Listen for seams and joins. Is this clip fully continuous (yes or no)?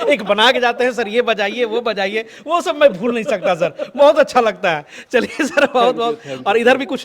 yes